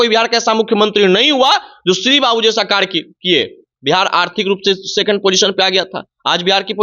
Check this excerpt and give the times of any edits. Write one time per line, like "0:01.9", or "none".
none